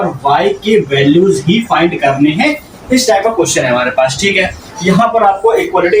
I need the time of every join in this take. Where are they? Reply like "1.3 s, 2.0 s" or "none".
none